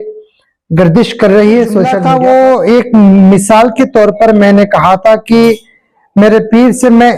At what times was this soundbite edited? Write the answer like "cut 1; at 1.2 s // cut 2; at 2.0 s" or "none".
cut 1; at 2.0 s